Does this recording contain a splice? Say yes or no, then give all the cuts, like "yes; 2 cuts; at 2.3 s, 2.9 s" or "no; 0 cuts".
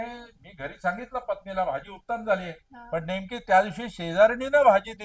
no; 0 cuts